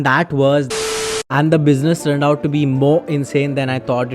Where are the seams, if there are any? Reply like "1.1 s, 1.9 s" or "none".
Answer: 1.1 s

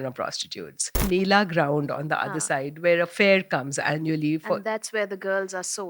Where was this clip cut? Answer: 1.0 s

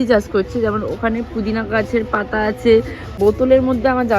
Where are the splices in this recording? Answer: 3.1 s

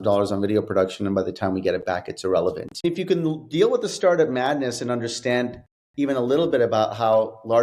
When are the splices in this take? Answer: 2.8 s

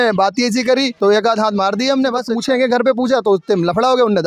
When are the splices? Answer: 0.9 s, 2.3 s

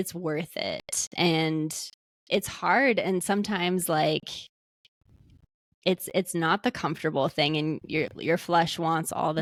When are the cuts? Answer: none

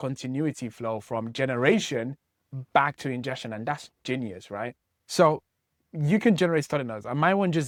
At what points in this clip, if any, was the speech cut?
none

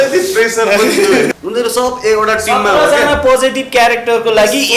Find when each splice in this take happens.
1.3 s

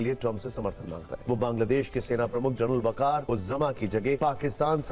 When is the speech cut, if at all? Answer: 1.1 s, 3.2 s, 4.2 s

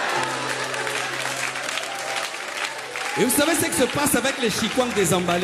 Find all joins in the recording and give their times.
none

